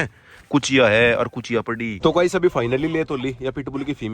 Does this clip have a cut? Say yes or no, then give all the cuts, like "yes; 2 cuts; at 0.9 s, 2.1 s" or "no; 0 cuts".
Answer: yes; 1 cut; at 1.9 s